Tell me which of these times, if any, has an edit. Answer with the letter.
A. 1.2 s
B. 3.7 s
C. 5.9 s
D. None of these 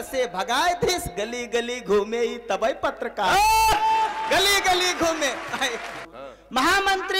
C